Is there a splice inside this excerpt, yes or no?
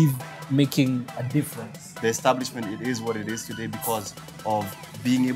yes